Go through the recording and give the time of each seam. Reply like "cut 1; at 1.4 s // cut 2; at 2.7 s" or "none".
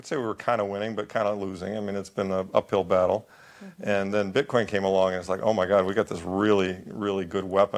none